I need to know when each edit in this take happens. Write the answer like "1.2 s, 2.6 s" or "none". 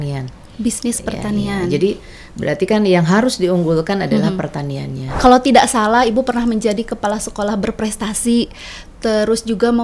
5.2 s